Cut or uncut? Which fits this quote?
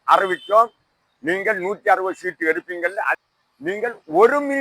cut